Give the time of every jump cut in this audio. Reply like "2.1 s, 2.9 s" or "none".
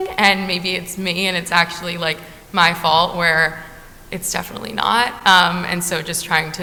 none